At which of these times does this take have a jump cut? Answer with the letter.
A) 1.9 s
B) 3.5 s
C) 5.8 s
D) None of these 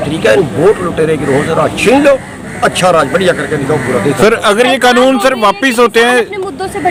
D